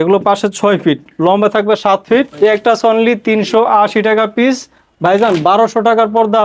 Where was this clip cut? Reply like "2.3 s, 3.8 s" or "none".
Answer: 2.3 s